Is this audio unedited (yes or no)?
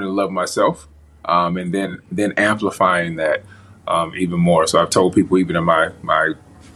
yes